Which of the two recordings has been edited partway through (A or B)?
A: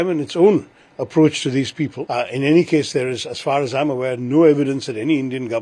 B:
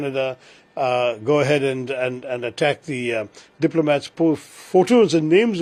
A